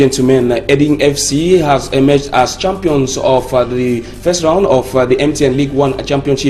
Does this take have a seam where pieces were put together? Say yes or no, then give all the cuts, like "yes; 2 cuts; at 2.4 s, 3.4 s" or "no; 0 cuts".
no; 0 cuts